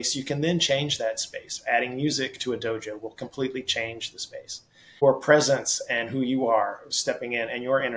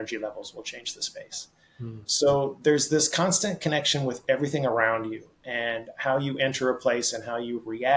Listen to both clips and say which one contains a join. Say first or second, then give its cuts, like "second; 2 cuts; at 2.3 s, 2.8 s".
first; 1 cut; at 5.0 s